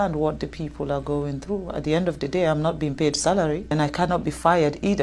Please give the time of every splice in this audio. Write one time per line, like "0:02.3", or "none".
0:03.7